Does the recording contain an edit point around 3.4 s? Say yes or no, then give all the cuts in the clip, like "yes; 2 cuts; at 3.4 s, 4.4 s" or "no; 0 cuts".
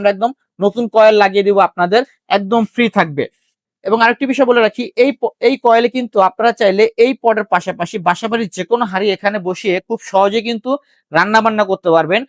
no; 0 cuts